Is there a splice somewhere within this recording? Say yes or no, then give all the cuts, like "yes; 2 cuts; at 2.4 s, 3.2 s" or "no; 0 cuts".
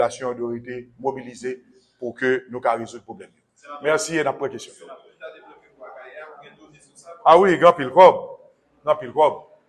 yes; 1 cut; at 4.6 s